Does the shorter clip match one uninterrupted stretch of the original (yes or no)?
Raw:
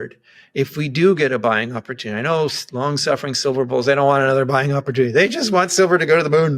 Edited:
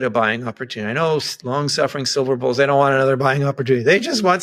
yes